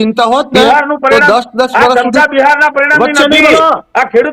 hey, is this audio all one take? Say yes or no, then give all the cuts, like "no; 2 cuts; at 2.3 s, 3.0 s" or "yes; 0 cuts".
yes; 0 cuts